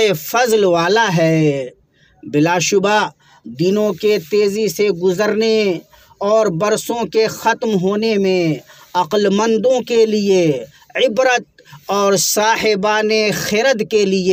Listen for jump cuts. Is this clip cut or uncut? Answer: uncut